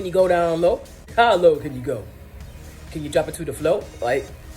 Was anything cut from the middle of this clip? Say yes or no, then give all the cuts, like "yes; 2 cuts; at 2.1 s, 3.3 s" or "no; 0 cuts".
yes; 1 cut; at 0.9 s